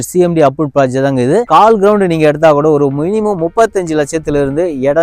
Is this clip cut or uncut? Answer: uncut